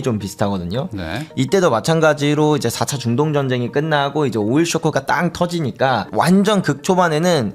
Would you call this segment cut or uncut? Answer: cut